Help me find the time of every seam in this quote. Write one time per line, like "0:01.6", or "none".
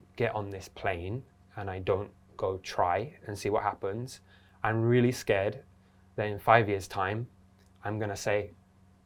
none